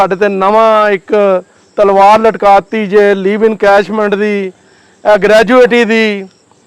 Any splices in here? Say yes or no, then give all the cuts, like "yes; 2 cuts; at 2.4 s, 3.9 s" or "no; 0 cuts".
no; 0 cuts